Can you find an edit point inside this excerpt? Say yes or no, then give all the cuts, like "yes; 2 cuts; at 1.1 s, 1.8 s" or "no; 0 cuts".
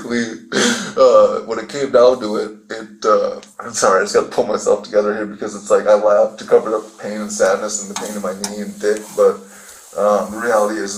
no; 0 cuts